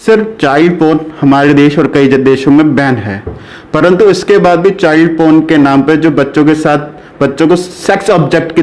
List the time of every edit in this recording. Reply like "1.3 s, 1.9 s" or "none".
none